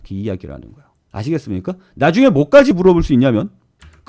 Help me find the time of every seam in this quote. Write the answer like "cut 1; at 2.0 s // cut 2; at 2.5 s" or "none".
cut 1; at 2.7 s

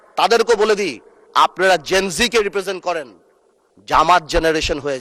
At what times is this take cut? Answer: none

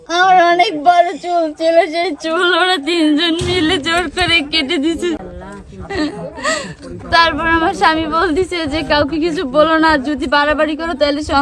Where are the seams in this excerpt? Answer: none

